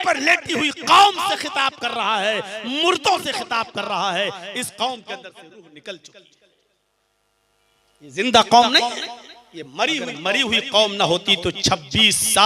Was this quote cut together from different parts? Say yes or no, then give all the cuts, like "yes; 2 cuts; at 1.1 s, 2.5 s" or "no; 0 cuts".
yes; 1 cut; at 10.3 s